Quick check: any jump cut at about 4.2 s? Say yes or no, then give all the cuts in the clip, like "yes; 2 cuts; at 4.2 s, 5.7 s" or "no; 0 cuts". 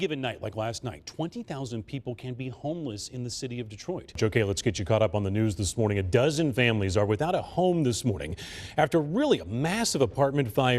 yes; 1 cut; at 4.2 s